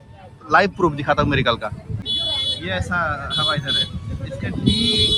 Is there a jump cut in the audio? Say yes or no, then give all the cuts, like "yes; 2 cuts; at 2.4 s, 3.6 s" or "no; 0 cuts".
yes; 1 cut; at 1.9 s